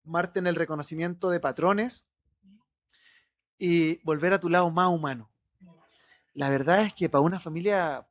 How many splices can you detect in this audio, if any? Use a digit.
1